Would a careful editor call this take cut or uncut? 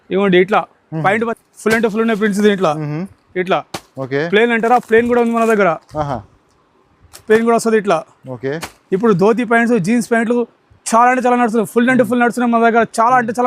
cut